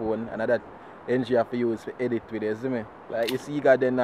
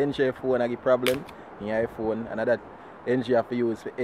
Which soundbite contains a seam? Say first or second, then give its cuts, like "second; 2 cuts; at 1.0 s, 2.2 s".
first; 1 cut; at 3.0 s